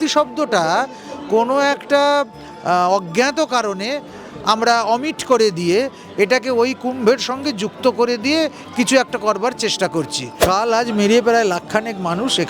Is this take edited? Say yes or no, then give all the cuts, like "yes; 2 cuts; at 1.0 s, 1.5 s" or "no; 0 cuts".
yes; 1 cut; at 10.3 s